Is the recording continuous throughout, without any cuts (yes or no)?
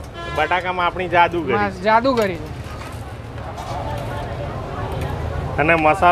yes